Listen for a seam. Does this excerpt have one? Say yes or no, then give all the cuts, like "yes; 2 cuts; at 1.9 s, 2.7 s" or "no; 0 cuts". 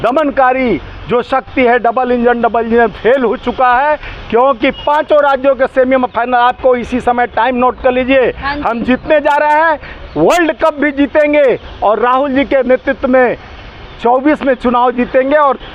no; 0 cuts